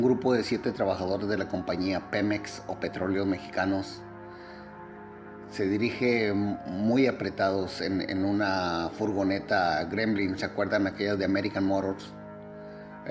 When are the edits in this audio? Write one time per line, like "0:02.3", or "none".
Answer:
0:10.8